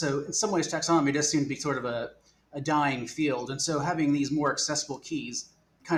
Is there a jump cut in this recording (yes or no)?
no